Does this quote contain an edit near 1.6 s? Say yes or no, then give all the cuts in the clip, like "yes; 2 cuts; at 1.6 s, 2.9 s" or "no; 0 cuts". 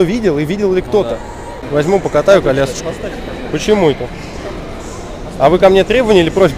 yes; 1 cut; at 1.6 s